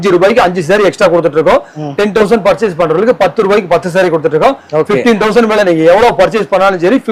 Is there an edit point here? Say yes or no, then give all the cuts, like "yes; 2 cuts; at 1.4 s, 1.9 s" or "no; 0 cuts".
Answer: no; 0 cuts